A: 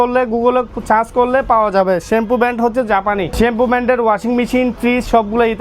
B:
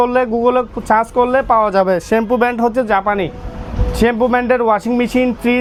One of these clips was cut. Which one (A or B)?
A